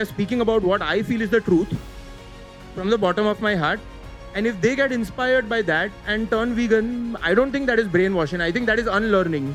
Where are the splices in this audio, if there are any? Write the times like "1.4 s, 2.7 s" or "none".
none